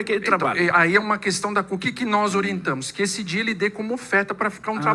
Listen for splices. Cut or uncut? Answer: uncut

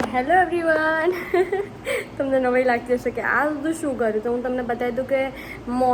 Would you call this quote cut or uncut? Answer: uncut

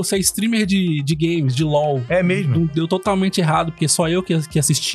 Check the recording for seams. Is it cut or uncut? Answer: uncut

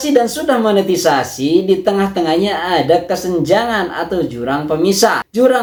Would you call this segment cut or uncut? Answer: uncut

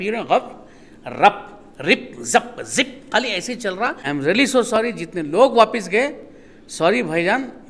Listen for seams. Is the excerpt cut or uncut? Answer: cut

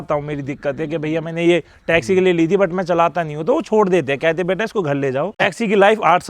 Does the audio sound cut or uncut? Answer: cut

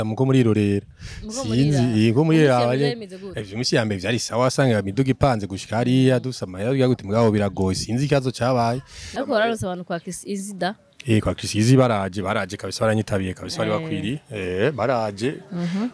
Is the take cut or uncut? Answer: cut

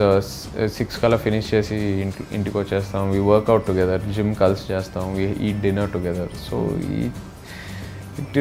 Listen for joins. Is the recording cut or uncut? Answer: uncut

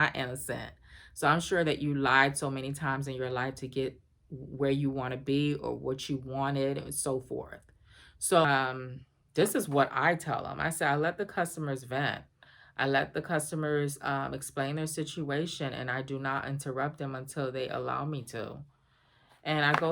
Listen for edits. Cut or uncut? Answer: cut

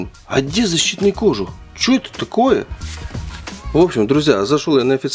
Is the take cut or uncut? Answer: uncut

